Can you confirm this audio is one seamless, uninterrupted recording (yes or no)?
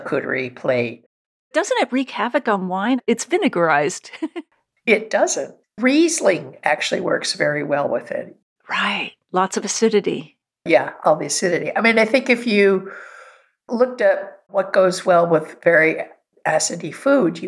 no